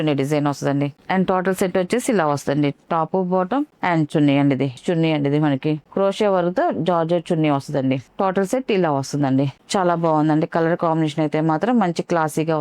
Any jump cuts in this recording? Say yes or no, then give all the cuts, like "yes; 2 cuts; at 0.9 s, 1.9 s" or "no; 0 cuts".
yes; 3 cuts; at 1.0 s, 4.8 s, 9.6 s